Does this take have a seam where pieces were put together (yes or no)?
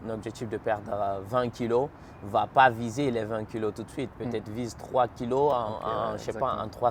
no